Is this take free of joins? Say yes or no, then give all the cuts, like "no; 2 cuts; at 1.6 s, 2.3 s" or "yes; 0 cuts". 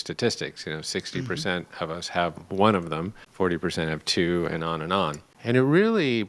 no; 2 cuts; at 3.2 s, 5.3 s